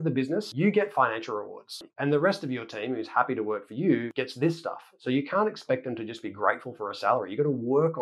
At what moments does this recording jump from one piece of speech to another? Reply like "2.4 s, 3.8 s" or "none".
1.8 s